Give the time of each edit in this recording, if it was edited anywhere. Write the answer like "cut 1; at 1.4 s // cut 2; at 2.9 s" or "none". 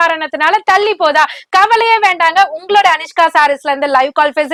none